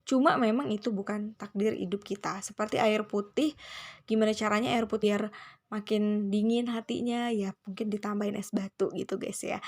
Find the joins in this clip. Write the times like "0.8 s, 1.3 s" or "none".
5.0 s

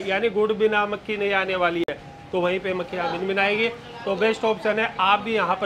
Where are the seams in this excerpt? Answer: none

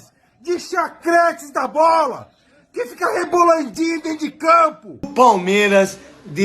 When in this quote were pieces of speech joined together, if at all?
5.1 s

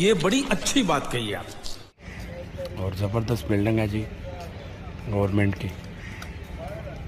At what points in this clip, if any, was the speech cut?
none

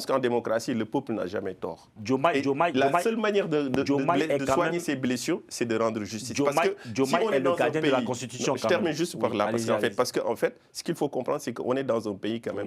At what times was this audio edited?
1.9 s

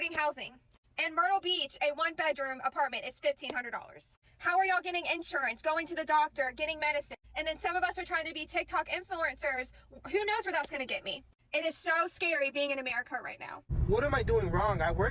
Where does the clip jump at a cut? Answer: 11.4 s

